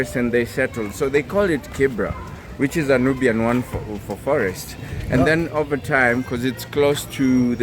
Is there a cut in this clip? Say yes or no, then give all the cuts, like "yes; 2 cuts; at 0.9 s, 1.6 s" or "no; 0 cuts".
no; 0 cuts